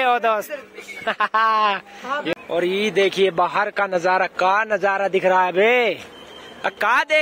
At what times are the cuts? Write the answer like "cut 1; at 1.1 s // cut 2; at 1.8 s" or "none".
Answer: cut 1; at 2.2 s